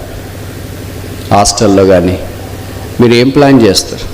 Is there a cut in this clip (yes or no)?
no